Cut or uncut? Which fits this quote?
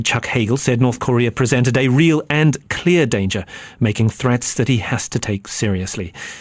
uncut